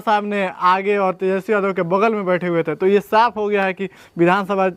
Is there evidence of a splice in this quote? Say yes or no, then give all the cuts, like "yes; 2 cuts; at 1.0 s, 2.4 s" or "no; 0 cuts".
no; 0 cuts